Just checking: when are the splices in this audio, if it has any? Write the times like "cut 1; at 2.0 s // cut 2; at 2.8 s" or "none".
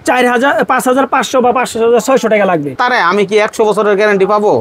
cut 1; at 2.8 s